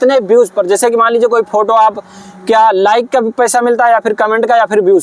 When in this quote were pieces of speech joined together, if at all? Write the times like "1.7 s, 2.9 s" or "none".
none

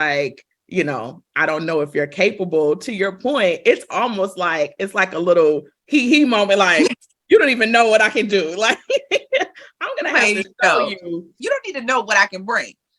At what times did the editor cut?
11.4 s

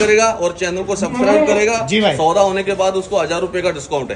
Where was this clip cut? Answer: none

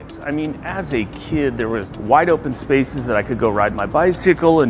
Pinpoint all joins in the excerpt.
1.9 s

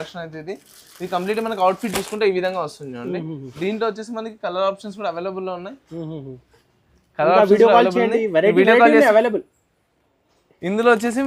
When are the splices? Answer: none

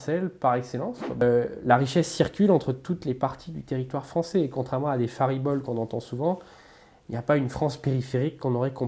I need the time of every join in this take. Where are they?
1.2 s

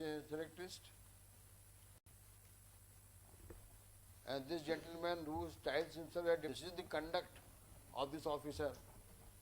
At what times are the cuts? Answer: 6.5 s

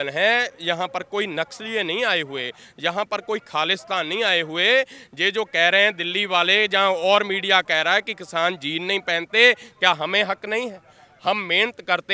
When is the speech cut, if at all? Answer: none

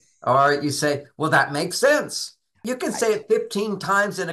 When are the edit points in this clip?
2.6 s

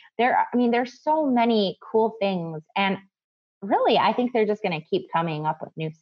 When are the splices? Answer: none

